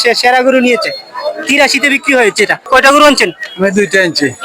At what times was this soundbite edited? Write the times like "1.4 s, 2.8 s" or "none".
2.6 s